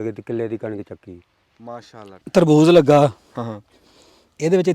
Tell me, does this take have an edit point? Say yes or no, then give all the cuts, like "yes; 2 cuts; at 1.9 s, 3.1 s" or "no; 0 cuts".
yes; 1 cut; at 2.1 s